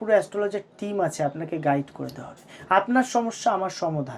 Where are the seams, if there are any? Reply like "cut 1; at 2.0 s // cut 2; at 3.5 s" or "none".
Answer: none